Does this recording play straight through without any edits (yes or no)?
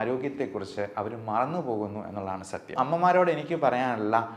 no